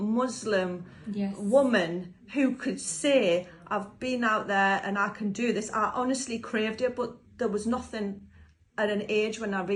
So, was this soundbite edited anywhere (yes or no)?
no